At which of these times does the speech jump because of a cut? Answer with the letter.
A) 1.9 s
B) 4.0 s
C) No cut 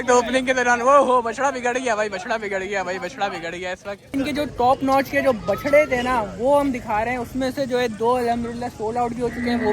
B